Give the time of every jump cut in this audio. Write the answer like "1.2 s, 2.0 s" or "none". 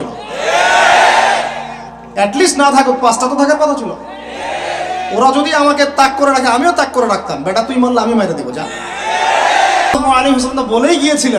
10.0 s